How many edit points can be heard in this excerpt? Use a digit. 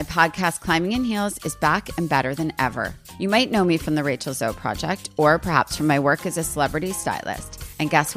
0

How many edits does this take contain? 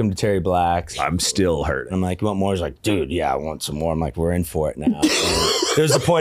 3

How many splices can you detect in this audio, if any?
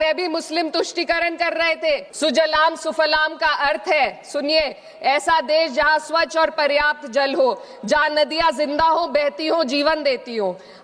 1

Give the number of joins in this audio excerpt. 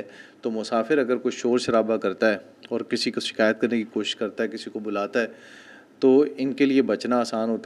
0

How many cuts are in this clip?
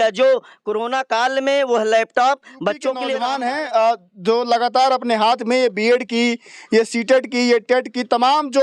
1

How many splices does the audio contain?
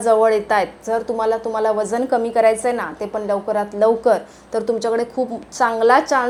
0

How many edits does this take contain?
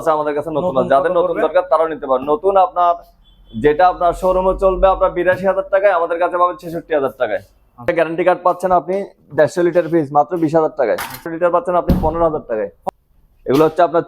3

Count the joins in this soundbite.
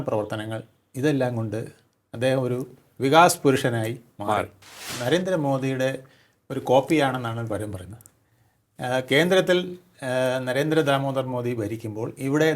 1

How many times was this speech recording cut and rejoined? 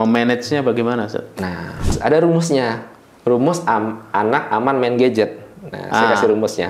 1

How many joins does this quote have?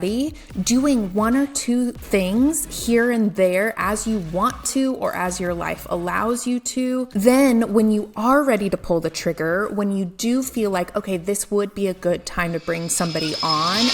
2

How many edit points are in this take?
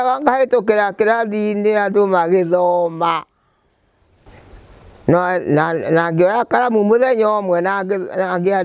1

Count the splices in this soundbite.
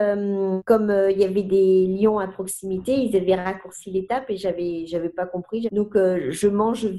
1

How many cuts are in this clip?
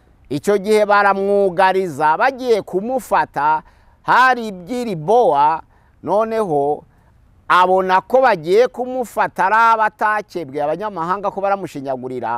0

